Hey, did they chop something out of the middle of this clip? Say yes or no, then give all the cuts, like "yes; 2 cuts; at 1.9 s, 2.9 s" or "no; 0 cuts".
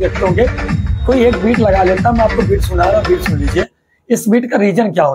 no; 0 cuts